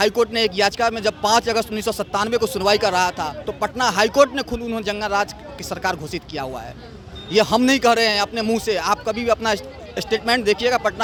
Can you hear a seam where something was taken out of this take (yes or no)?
no